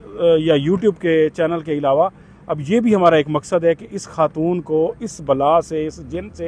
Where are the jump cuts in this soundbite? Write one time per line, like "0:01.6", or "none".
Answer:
none